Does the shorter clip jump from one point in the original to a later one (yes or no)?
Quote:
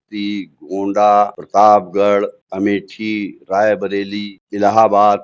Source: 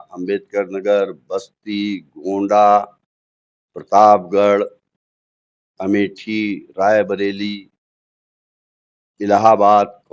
yes